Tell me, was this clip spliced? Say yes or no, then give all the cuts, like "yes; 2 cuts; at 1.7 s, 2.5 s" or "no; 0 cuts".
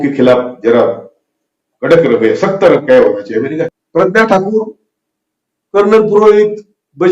yes; 1 cut; at 3.6 s